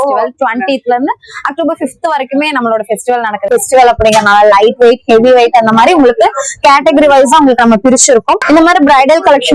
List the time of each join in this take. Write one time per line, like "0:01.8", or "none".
0:03.5
0:08.4